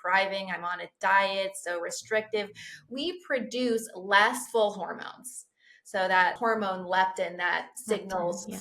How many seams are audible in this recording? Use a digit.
2